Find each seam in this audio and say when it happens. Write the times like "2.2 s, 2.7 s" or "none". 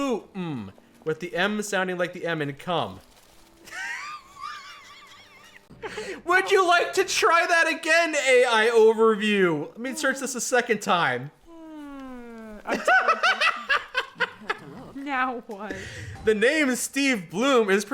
5.7 s